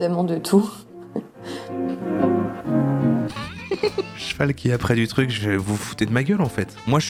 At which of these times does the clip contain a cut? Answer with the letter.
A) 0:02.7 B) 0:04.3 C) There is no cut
C